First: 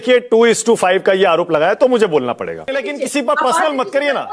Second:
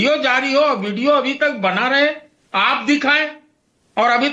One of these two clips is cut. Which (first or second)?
first